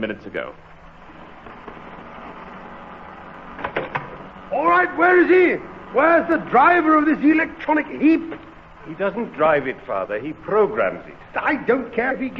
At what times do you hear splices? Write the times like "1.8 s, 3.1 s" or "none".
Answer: none